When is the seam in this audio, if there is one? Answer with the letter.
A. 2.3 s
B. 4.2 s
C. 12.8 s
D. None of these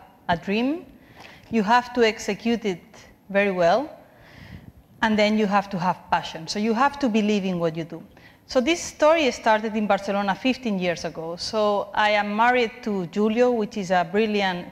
D